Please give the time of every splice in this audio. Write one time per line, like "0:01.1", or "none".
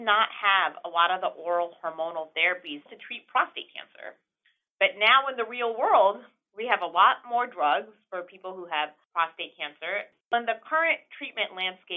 0:10.3